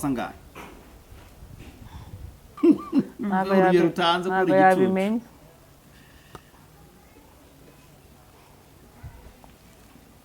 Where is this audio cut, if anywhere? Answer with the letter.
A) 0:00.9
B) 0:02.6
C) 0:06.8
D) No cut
B